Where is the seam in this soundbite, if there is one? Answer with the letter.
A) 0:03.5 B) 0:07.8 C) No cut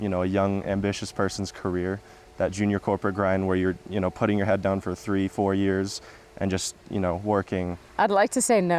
B